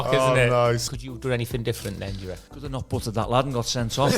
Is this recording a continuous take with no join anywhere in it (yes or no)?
no